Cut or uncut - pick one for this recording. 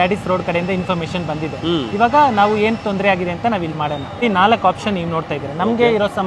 uncut